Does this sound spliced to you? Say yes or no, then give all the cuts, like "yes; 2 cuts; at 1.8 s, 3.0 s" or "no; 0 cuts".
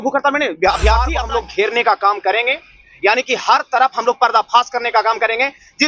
yes; 1 cut; at 1.2 s